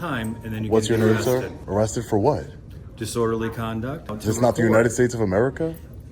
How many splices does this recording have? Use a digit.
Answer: 2